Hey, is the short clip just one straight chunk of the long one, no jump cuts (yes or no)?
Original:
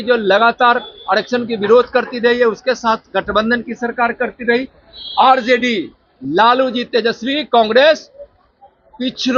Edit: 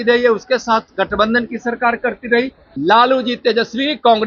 no